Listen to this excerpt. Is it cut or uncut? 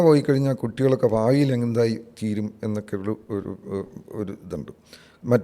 uncut